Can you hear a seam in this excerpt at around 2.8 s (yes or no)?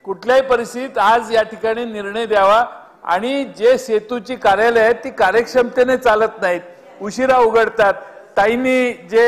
no